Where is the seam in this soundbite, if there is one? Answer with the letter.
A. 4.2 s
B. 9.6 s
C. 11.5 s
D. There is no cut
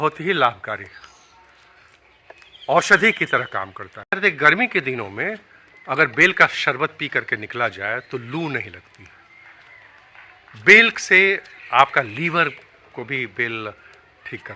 A